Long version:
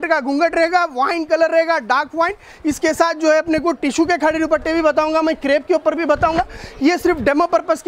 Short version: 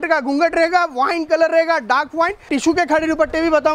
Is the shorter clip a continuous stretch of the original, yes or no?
no